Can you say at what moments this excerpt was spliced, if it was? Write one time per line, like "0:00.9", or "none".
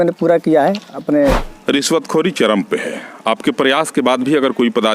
0:01.5